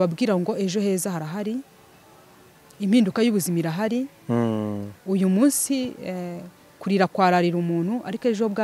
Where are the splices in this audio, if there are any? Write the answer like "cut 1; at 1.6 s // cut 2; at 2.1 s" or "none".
none